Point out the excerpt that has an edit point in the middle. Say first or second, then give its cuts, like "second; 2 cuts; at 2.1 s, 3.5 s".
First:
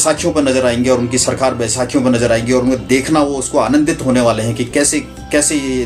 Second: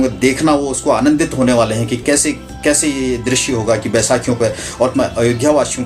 second; 1 cut; at 4.9 s